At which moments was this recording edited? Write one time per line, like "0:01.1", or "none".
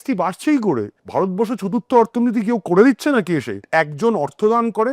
0:01.0
0:03.6